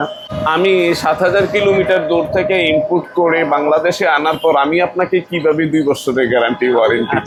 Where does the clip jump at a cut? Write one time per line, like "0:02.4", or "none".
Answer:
none